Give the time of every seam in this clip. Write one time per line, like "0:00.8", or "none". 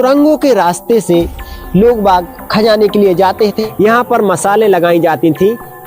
0:03.5